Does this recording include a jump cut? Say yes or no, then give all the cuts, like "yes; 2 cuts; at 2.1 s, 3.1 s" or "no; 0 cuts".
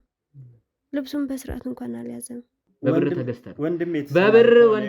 yes; 1 cut; at 2.6 s